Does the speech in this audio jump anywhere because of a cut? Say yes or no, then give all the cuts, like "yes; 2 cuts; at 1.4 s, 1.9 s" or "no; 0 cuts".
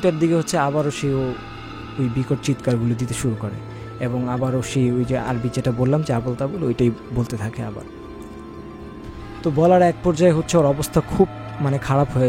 no; 0 cuts